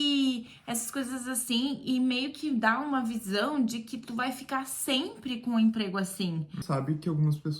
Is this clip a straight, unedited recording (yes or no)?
no